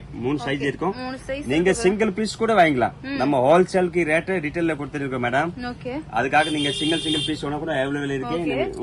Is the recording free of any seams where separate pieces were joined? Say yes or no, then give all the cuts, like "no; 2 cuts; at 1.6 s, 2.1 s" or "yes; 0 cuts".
yes; 0 cuts